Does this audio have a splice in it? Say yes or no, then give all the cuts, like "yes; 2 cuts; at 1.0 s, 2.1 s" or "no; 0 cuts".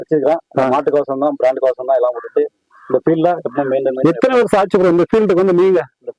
no; 0 cuts